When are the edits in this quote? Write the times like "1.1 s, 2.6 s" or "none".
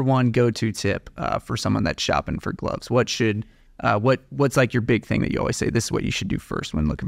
none